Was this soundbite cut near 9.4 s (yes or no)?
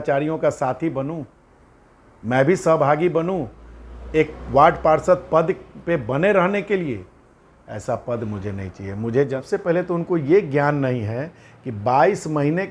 yes